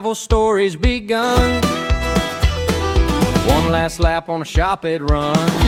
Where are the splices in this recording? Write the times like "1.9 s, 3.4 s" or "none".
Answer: none